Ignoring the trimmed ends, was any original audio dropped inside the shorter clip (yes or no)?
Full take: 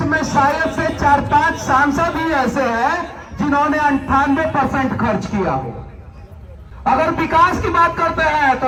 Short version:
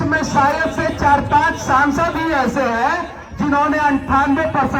no